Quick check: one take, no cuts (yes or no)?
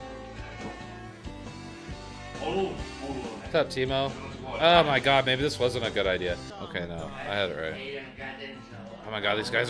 no